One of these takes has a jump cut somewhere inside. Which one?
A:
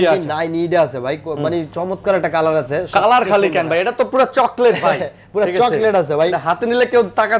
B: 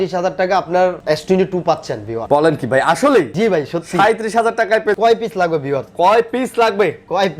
B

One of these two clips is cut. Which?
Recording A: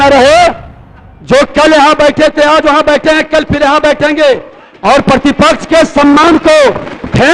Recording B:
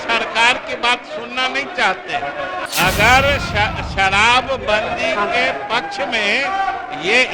B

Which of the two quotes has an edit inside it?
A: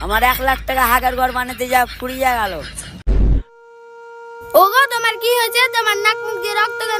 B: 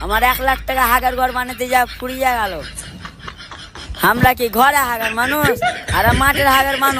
A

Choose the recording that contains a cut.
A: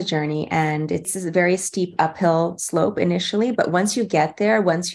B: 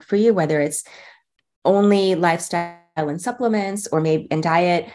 A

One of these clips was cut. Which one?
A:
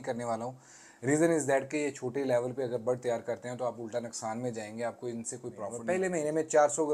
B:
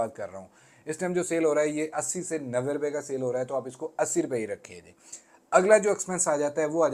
A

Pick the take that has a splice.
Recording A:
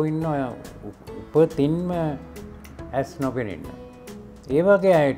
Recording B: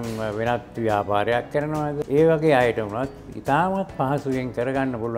B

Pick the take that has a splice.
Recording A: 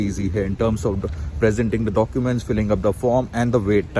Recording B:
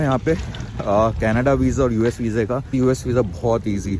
B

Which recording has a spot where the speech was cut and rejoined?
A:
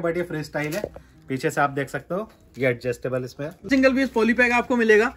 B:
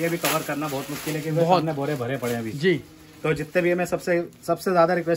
A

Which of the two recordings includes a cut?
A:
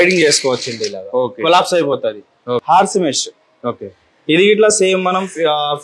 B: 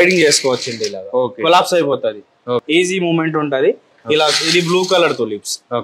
A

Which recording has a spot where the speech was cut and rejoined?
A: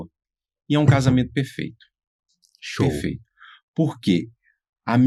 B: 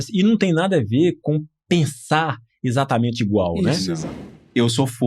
B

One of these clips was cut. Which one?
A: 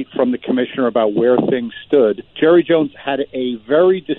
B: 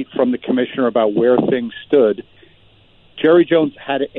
A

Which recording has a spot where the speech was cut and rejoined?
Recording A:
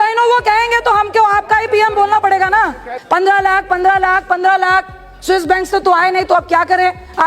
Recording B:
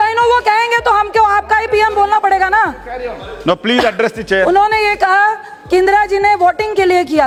A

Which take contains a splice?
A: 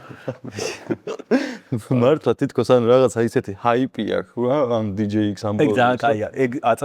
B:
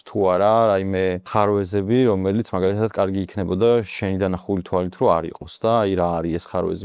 B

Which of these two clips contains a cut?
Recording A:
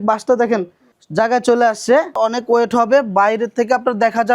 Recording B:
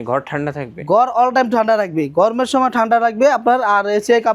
A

